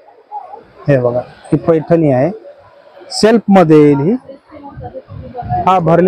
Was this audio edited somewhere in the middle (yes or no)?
no